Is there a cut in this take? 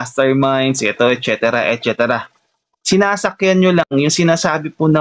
no; 0 cuts

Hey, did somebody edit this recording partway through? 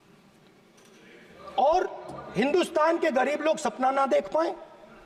no; 0 cuts

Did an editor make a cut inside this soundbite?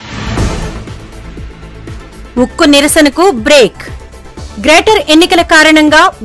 yes; 1 cut; at 2.0 s

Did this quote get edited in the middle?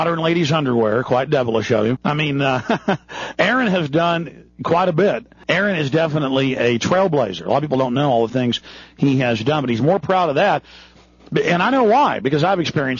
no; 0 cuts

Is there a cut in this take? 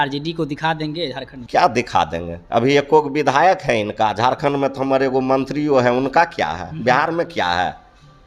yes; 1 cut; at 1.3 s

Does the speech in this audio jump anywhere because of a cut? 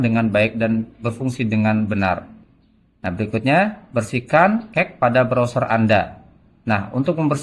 no; 0 cuts

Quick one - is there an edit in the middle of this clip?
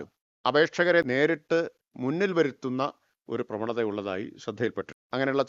yes; 1 cut; at 1.0 s

